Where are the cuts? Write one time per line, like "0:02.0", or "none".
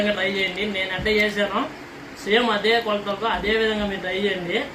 none